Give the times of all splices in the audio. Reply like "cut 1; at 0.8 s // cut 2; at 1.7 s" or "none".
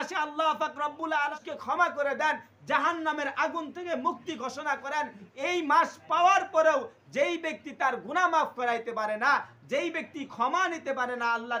cut 1; at 1.4 s